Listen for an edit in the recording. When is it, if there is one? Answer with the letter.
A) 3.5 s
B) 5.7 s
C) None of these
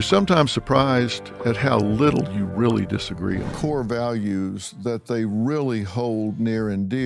A